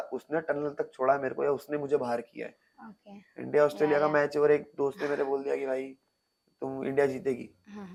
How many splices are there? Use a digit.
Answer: 0